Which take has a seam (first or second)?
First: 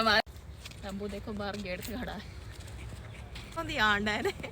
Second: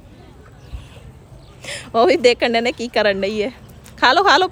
first